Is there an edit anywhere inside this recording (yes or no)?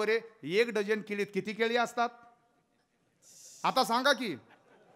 no